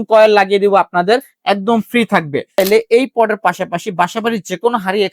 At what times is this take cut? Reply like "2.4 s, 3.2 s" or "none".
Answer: 2.6 s